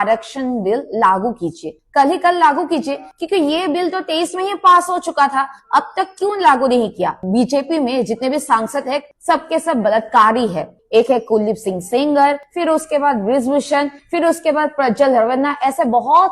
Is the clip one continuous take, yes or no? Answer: no